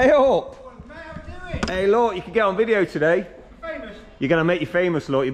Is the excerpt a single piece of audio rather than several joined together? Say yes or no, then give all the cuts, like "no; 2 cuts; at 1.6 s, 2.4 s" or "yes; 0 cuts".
yes; 0 cuts